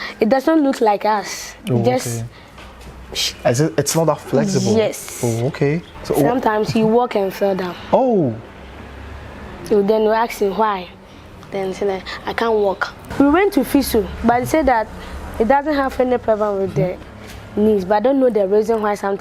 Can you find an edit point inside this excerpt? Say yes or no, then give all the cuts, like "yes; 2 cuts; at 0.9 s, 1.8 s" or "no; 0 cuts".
yes; 2 cuts; at 5.9 s, 13.0 s